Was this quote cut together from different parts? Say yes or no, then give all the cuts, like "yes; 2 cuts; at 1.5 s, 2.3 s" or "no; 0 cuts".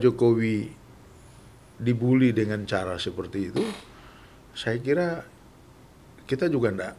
no; 0 cuts